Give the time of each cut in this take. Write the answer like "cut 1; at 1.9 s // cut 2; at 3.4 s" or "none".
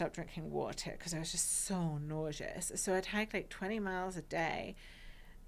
none